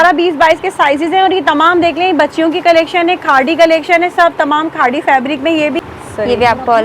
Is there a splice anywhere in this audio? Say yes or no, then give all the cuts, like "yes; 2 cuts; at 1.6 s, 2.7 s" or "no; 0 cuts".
yes; 1 cut; at 5.8 s